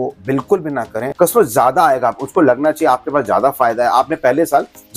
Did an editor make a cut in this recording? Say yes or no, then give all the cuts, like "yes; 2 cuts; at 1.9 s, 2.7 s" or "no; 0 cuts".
yes; 1 cut; at 1.0 s